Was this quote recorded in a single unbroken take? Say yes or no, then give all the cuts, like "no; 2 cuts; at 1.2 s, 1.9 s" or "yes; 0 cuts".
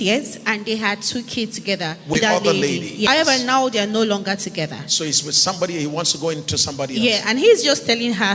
no; 2 cuts; at 2.1 s, 3.1 s